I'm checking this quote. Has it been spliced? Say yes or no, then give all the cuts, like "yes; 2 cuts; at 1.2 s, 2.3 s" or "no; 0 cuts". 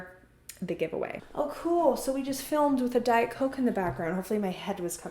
yes; 1 cut; at 1.2 s